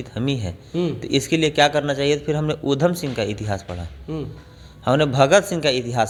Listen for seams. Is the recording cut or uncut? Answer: uncut